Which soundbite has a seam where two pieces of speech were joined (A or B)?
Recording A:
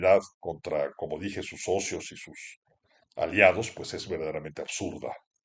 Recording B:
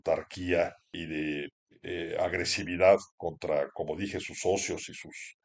B